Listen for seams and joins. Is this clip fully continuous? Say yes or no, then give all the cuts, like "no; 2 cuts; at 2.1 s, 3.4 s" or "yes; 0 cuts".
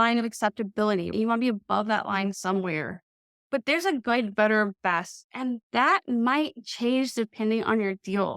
no; 1 cut; at 1.1 s